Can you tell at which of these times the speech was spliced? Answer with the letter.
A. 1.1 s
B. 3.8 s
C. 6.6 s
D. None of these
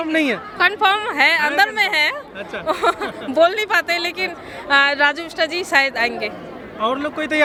D